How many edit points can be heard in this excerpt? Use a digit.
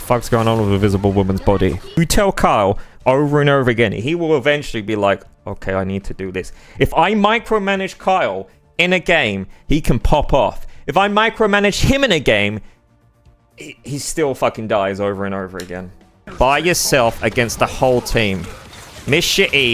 2